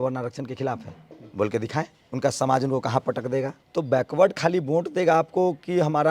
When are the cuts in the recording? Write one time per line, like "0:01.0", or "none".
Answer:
0:02.0
0:03.6